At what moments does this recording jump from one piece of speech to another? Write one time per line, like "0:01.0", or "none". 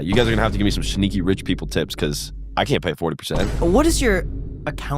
0:03.5